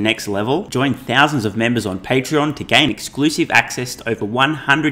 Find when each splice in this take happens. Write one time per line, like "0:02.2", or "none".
none